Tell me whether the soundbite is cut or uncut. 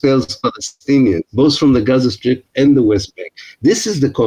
cut